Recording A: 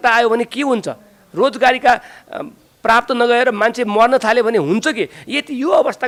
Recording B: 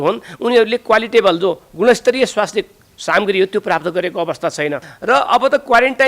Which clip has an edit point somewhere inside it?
B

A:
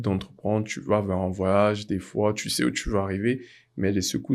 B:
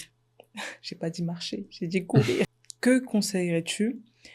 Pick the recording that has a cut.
B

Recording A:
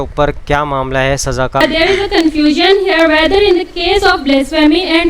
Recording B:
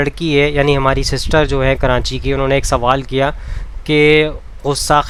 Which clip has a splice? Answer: A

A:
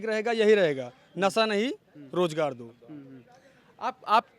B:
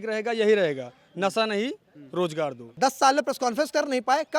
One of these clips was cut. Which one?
B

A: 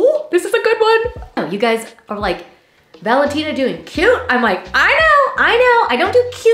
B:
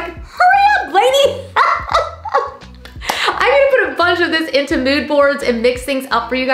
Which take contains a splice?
A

